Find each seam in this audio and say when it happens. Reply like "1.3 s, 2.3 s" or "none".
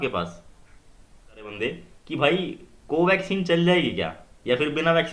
1.5 s